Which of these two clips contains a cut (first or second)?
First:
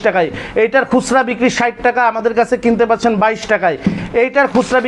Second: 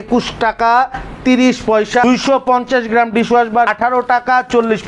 second